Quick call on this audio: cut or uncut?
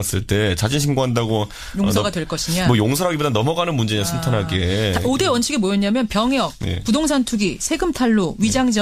uncut